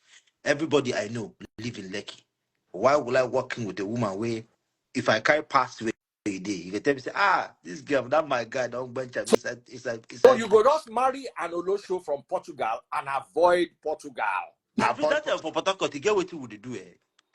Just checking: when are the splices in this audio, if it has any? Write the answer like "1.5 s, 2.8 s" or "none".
15.1 s